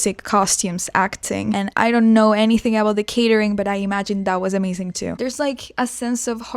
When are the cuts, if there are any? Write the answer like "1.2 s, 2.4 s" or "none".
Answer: 1.7 s, 5.3 s